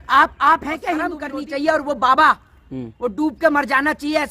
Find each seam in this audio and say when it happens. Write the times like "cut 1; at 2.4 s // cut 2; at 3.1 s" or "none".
cut 1; at 1.2 s